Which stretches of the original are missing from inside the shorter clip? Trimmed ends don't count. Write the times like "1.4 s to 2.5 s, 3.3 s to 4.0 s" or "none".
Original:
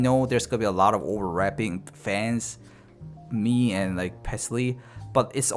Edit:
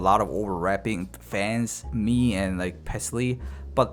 2.5 s to 3.2 s